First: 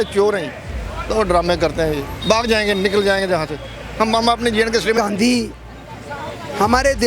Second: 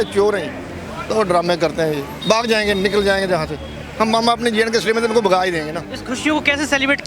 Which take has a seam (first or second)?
first